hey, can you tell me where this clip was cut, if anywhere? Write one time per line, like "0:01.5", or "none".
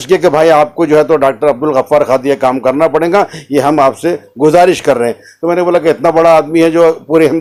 none